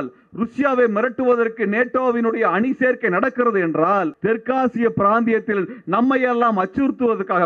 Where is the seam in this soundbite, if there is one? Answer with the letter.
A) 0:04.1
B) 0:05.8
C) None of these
A